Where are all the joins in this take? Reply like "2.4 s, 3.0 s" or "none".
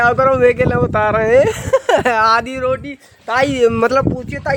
none